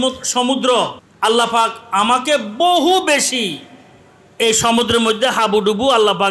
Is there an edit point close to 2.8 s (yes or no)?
no